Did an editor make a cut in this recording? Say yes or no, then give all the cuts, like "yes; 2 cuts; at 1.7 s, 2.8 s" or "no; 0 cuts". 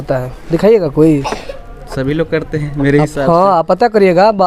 no; 0 cuts